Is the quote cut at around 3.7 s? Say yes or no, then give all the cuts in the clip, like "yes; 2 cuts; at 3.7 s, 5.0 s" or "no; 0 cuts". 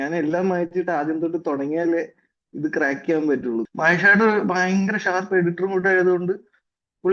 yes; 1 cut; at 3.7 s